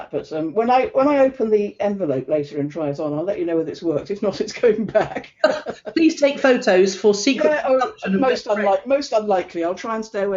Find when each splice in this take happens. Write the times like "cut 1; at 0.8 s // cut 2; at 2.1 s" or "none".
none